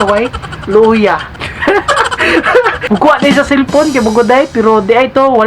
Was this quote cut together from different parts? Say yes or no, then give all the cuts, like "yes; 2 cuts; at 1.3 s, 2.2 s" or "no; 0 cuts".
yes; 2 cuts; at 1.5 s, 2.8 s